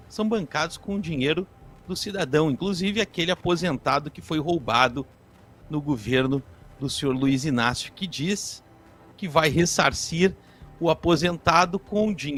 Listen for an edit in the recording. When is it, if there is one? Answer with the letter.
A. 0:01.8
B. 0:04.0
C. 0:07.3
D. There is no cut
D